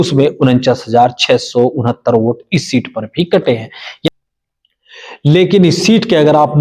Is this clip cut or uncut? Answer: cut